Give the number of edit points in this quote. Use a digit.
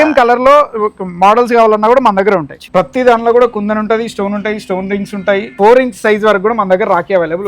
2